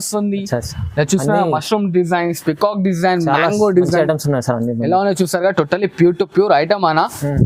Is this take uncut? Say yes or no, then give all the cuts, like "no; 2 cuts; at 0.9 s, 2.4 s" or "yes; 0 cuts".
yes; 0 cuts